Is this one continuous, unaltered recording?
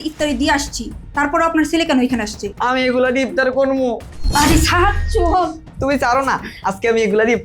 no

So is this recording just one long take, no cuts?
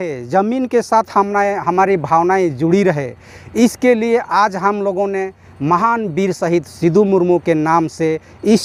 yes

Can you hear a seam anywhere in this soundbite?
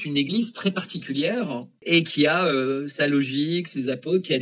yes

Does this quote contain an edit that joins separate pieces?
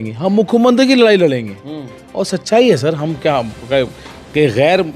no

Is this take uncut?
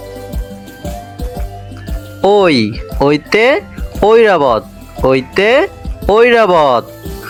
yes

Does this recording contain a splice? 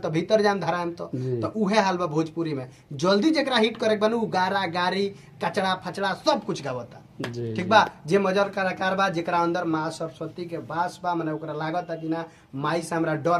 no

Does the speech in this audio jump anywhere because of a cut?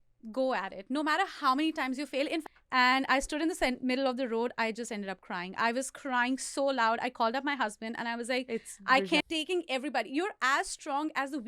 yes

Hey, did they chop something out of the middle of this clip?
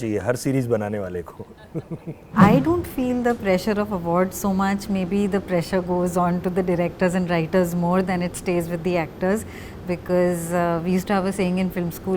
yes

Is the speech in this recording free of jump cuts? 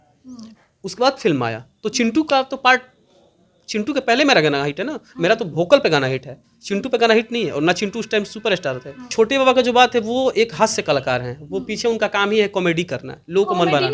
no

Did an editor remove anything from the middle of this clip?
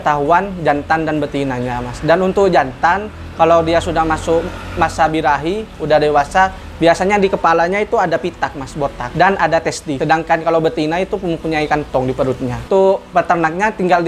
yes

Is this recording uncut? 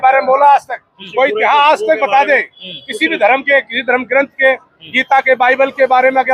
yes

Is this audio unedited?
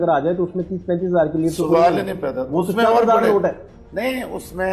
yes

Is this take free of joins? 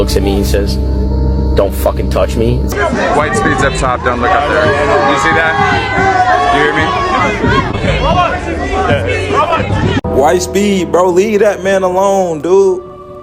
no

